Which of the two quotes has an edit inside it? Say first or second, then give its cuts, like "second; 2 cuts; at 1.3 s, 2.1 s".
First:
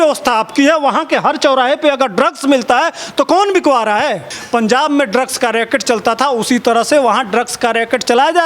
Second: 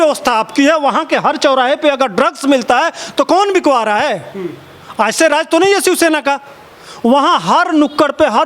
first; 1 cut; at 4.3 s